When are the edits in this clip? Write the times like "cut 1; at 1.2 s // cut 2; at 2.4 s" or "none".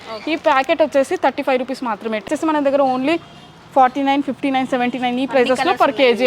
cut 1; at 2.3 s